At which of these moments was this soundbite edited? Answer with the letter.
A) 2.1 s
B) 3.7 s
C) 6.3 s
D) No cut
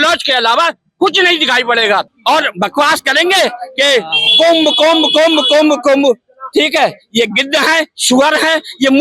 A